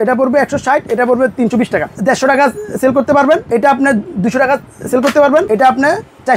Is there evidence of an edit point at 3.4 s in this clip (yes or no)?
yes